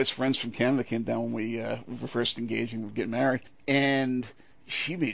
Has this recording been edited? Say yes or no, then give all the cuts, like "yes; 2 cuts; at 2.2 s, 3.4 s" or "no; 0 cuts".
no; 0 cuts